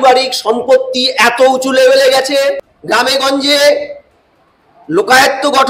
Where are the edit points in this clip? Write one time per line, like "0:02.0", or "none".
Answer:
0:02.7